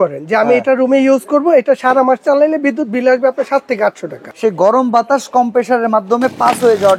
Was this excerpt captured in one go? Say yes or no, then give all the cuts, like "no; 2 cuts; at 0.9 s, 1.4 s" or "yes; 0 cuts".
no; 1 cut; at 4.2 s